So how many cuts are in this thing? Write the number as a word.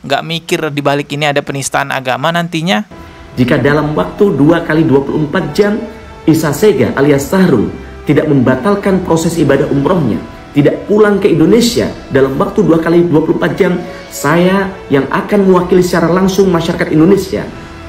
one